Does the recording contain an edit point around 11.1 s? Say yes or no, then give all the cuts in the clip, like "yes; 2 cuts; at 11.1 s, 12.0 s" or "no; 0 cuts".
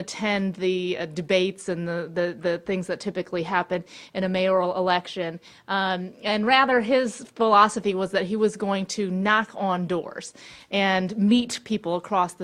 yes; 1 cut; at 11.1 s